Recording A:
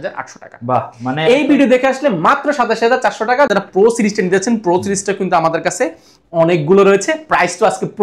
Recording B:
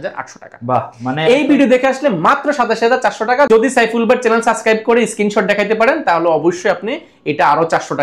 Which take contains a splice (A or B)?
A